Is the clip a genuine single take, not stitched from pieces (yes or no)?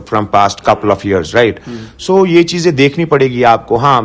yes